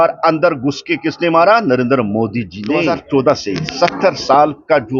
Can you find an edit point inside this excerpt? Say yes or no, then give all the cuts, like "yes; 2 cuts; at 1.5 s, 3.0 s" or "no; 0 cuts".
yes; 1 cut; at 2.8 s